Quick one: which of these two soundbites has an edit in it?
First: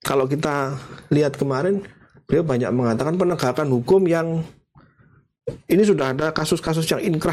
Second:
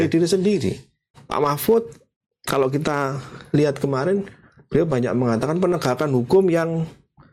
second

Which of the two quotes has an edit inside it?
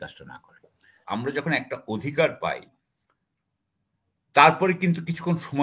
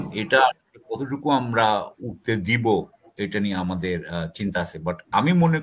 first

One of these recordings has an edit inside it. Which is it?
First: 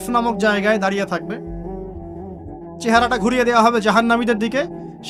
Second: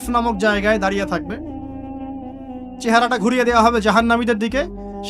second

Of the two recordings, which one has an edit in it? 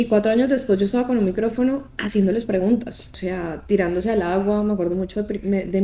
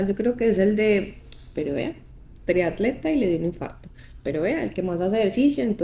first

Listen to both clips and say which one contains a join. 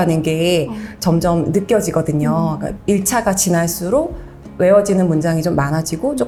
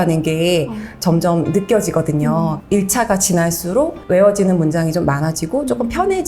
second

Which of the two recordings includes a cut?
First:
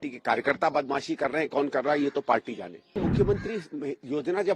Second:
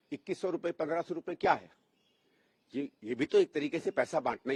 first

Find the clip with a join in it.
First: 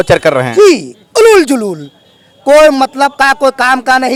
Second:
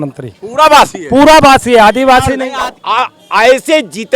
second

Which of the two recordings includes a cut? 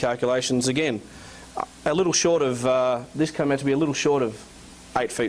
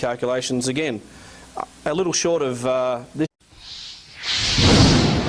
first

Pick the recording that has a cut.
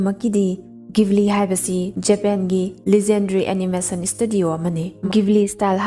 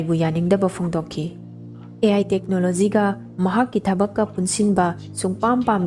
first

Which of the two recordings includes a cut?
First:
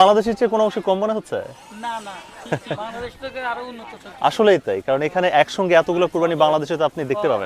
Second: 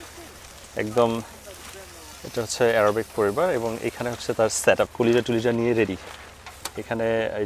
second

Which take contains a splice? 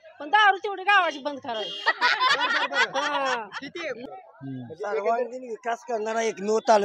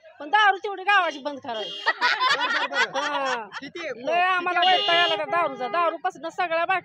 first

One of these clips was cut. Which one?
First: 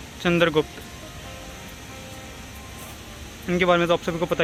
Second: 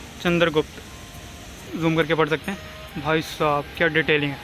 second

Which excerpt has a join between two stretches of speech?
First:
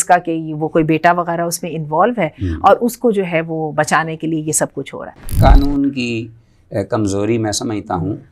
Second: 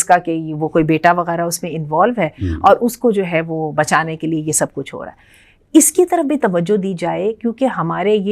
first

